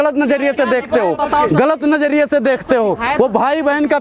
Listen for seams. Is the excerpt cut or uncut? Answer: uncut